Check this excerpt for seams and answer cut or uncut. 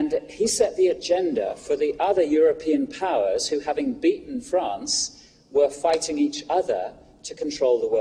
cut